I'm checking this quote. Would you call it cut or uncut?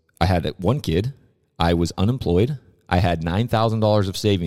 uncut